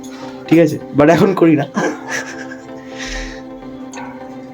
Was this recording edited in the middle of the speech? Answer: no; 0 cuts

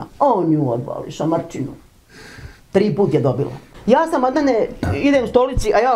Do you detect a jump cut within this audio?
yes; 1 cut; at 3.7 s

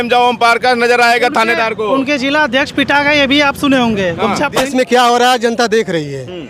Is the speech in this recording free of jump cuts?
no; 1 cut; at 4.6 s

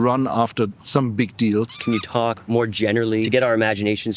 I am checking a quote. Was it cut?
yes; 2 cuts; at 1.8 s, 3.3 s

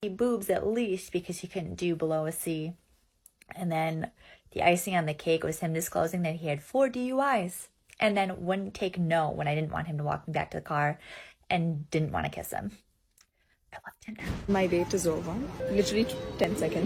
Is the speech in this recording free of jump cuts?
yes; 0 cuts

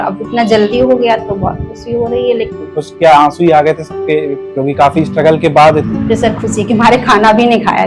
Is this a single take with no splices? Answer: no; 3 cuts; at 2.5 s, 4.5 s, 5.9 s

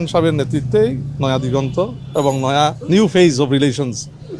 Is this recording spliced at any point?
no; 0 cuts

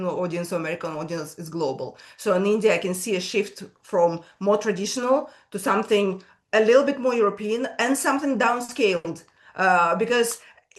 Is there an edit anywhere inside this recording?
no; 0 cuts

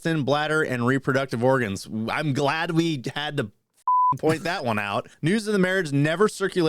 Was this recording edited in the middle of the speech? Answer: yes; 1 cut; at 5.1 s

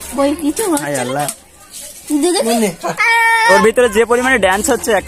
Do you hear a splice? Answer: yes; 1 cut; at 3.5 s

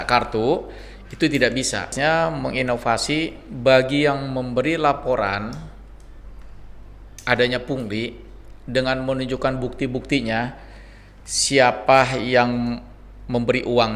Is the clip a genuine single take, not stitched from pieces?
no; 1 cut; at 1.9 s

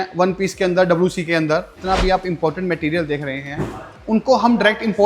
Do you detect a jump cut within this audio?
yes; 1 cut; at 1.7 s

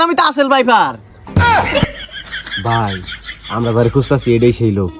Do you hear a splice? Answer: no; 0 cuts

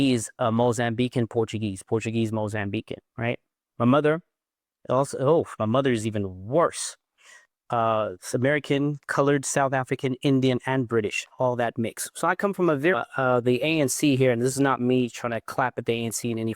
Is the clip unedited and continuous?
no; 1 cut; at 12.9 s

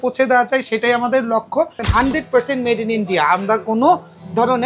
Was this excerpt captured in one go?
no; 1 cut; at 1.8 s

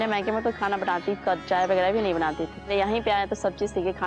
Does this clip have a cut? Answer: yes; 1 cut; at 2.5 s

